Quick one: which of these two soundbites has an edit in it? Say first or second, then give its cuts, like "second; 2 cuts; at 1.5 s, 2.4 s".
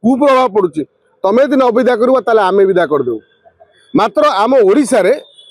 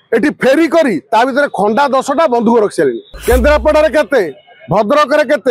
second; 1 cut; at 3.1 s